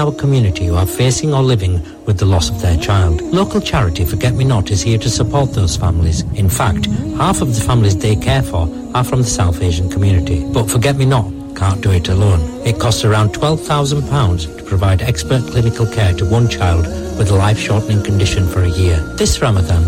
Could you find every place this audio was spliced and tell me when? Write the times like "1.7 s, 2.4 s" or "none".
none